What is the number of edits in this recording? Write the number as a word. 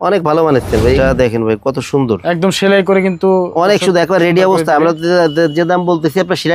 one